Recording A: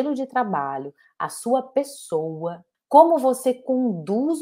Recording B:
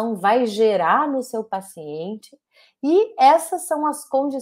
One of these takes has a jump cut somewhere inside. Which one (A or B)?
A